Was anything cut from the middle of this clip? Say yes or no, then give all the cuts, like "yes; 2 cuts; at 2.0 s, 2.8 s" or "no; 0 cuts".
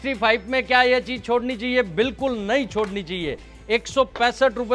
no; 0 cuts